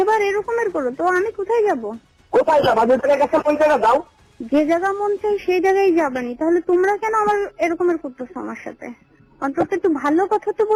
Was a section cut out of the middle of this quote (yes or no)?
no